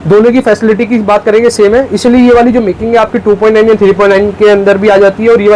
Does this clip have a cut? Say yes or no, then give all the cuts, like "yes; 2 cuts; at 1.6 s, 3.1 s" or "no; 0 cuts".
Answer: no; 0 cuts